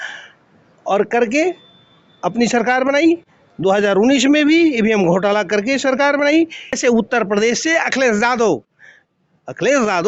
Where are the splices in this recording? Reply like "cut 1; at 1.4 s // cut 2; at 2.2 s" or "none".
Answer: cut 1; at 6.6 s